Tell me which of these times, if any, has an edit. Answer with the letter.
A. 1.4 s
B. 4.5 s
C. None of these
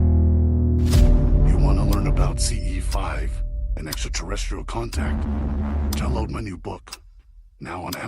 A